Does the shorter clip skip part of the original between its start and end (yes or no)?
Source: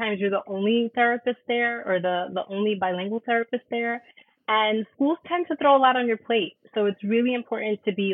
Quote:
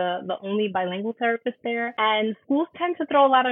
yes